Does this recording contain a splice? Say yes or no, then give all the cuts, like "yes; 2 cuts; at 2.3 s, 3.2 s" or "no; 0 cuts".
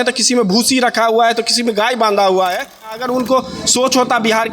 yes; 1 cut; at 2.9 s